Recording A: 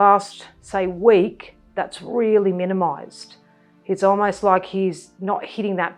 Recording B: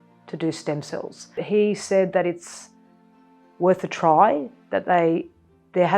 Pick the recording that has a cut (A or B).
B